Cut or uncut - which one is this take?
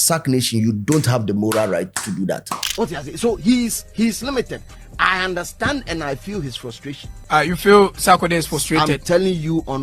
cut